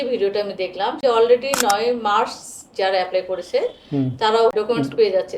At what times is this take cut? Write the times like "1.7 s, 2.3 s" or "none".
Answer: 1.0 s, 4.5 s